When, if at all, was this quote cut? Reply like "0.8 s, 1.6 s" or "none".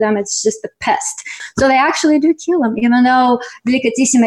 1.4 s

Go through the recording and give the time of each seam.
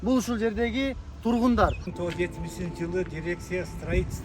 1.9 s

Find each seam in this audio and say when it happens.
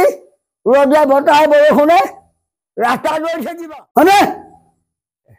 3.5 s

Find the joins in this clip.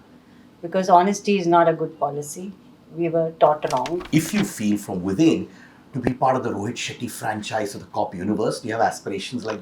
4.0 s

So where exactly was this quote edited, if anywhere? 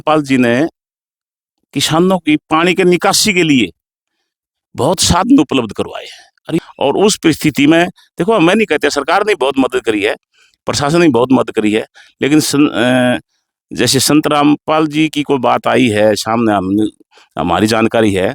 6.6 s

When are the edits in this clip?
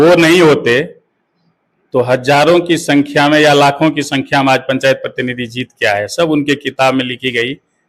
none

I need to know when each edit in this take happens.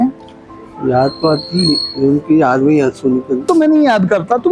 3.5 s

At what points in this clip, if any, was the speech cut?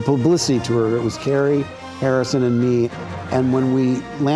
1.8 s

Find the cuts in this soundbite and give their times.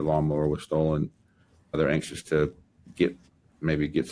1.7 s

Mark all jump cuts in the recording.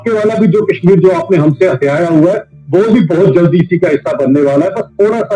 none

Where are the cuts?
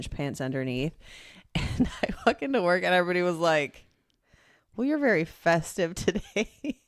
none

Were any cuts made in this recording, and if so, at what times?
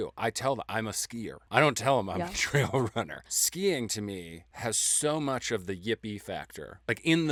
none

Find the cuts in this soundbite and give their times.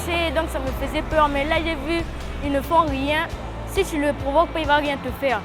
none

